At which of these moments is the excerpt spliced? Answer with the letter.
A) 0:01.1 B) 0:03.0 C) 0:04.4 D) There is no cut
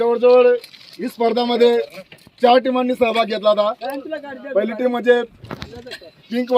D